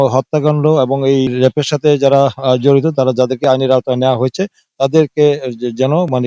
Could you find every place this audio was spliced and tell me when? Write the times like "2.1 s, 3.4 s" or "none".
1.3 s